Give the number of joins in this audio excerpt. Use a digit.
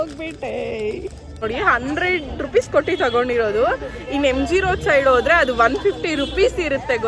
1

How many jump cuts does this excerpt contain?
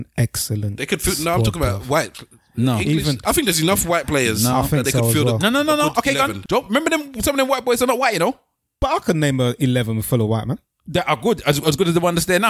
2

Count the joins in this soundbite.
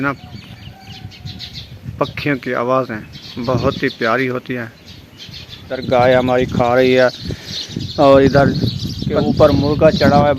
2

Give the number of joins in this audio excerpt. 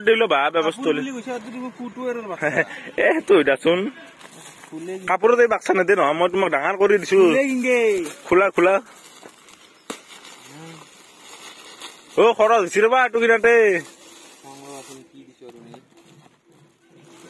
0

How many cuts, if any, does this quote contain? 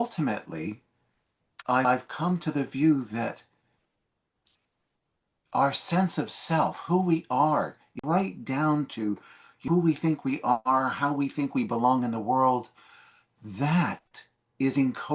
3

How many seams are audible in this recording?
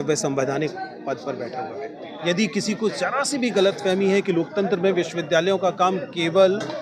1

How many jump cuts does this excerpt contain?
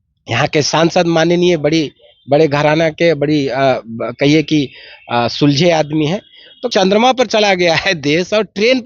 1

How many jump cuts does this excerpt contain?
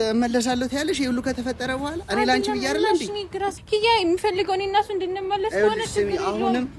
1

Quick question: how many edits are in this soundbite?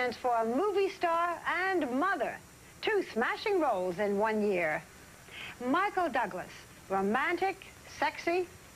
1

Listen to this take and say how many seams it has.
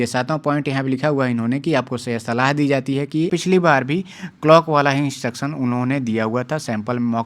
1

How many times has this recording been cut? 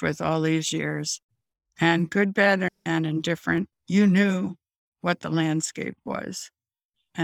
0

